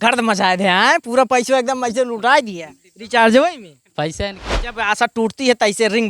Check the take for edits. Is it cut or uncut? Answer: cut